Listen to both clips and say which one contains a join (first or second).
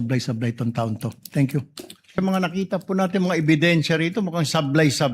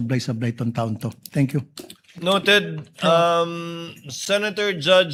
first